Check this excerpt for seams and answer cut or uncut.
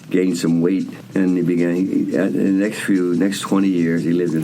cut